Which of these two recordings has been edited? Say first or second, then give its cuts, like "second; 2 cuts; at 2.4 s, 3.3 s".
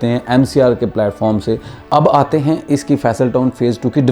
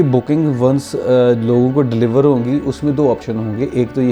first; 1 cut; at 1.7 s